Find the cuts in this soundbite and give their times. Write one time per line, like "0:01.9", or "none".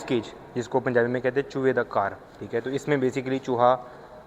none